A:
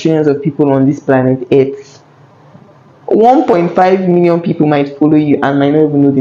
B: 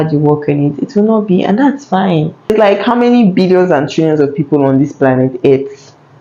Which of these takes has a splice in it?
B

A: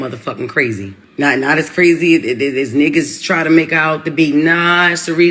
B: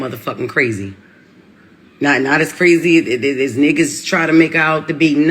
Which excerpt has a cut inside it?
A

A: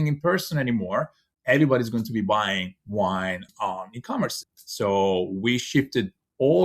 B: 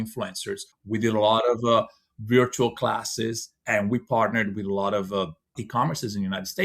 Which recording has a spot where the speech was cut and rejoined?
A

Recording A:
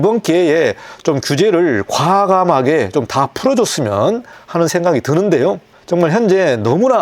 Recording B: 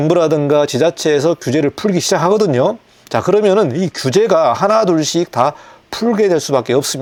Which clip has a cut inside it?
A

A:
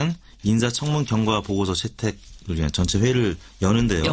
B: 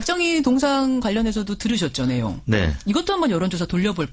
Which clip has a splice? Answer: B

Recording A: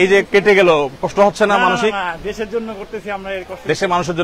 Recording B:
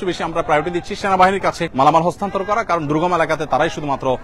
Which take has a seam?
B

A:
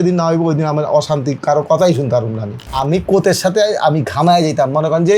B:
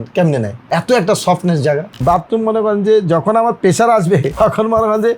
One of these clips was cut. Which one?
B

